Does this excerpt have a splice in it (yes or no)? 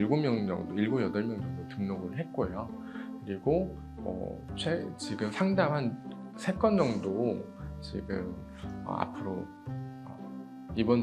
no